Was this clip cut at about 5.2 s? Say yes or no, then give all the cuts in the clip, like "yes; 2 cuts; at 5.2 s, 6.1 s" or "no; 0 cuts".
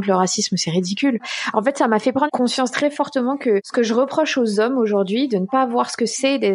no; 3 cuts; at 1.4 s, 2.3 s, 3.7 s